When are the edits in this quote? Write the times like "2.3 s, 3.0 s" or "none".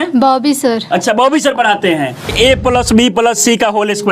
2.3 s

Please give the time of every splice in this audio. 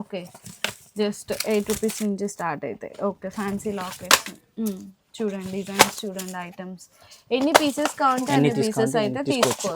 none

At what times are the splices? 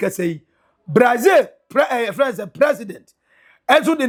none

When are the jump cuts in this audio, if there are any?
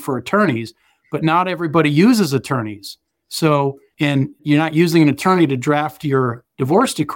3.8 s

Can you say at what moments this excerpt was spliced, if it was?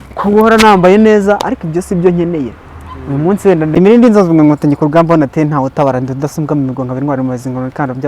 3.7 s

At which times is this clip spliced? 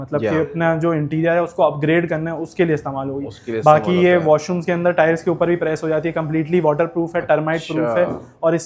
none

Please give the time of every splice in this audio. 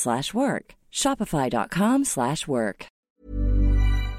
3.1 s

